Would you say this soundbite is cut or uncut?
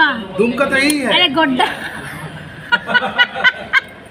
uncut